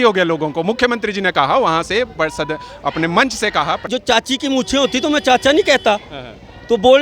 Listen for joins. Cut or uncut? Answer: cut